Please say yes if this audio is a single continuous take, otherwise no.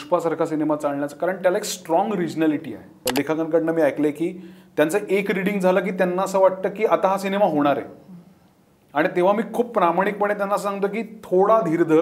no